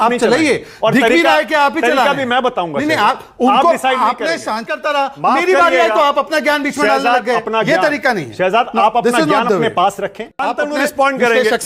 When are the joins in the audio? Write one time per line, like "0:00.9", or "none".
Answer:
0:04.7
0:10.5